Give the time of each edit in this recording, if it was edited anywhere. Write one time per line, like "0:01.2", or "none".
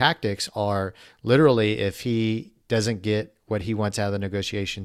none